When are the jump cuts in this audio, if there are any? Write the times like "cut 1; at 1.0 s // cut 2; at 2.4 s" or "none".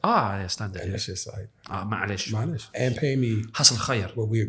cut 1; at 2.7 s